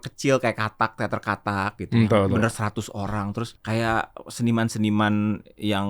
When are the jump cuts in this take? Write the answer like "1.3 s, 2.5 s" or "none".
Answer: 3.5 s